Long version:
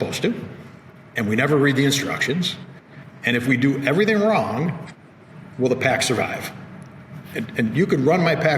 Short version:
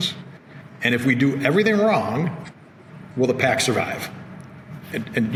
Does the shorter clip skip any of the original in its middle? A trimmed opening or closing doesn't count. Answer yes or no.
no